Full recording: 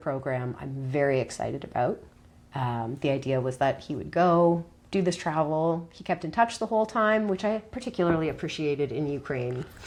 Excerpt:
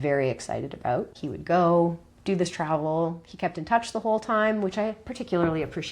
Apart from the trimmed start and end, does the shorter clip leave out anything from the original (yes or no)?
yes